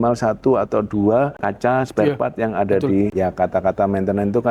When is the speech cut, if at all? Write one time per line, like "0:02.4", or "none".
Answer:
0:01.4
0:03.1